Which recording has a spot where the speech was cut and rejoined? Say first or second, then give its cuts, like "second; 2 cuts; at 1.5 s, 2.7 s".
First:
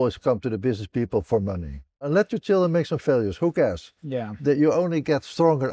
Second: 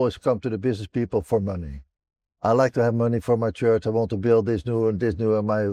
first; 1 cut; at 2.1 s